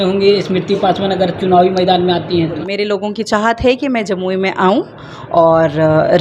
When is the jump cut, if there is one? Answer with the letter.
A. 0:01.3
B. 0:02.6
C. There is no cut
B